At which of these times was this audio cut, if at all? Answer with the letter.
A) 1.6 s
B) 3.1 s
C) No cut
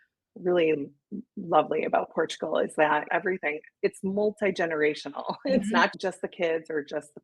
B